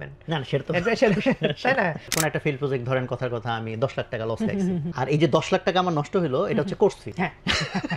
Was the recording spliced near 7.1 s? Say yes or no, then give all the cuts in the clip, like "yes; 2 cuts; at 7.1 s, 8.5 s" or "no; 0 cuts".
yes; 3 cuts; at 2.1 s, 4.9 s, 7.1 s